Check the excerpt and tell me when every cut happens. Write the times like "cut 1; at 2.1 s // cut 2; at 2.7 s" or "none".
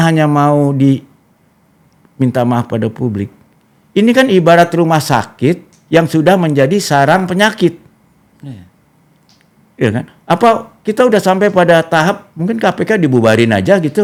none